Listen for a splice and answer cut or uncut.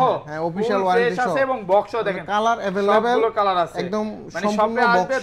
uncut